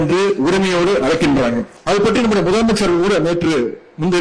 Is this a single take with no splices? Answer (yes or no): no